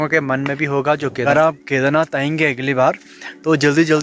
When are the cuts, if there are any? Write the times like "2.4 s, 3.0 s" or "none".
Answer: 1.2 s